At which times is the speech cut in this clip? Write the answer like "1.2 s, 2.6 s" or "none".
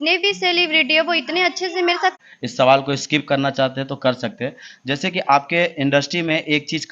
2.2 s

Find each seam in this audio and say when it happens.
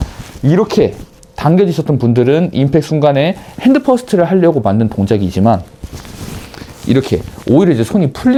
none

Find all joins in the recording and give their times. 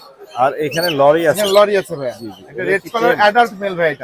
none

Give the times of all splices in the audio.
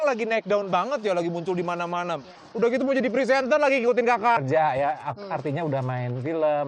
2.3 s, 4.4 s

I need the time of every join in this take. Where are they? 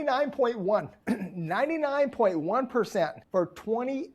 0.9 s, 3.2 s

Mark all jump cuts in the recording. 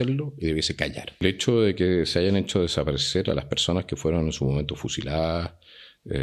1.0 s

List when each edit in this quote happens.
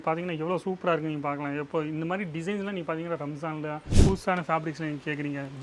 4.0 s

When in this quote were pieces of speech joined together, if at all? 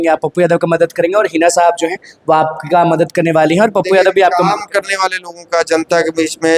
none

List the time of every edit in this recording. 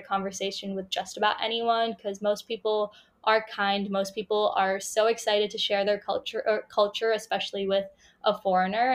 none

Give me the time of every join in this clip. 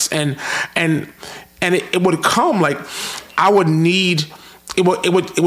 none

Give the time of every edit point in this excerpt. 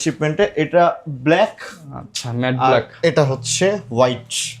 none

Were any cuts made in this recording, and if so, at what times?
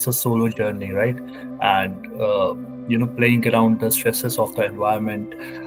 none

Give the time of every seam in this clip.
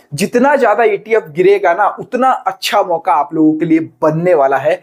none

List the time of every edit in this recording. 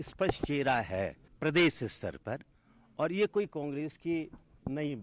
1.2 s

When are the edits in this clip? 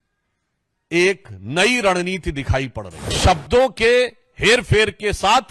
3.1 s

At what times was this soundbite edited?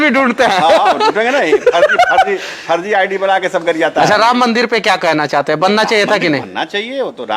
4.1 s

